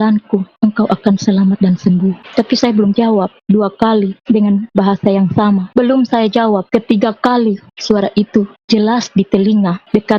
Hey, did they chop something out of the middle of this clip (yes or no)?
no